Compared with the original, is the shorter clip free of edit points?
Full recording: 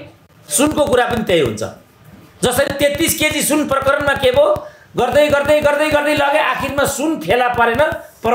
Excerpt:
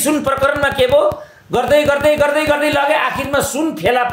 yes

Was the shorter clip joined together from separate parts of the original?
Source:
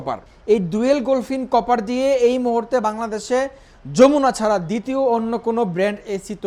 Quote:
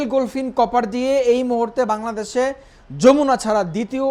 no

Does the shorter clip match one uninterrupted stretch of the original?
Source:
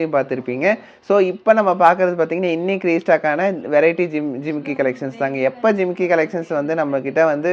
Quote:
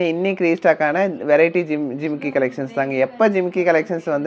yes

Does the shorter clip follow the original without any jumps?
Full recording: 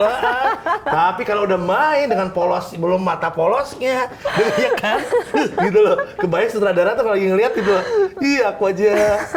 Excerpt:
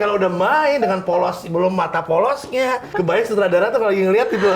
no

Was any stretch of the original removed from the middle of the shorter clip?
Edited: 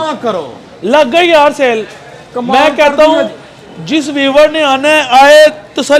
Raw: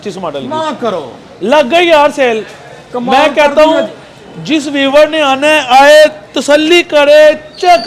no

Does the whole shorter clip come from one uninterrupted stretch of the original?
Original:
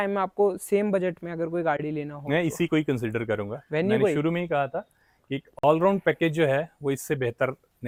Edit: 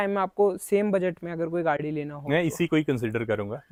yes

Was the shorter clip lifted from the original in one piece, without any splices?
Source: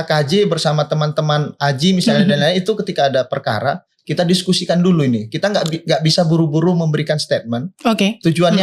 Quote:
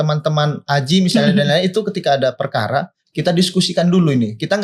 yes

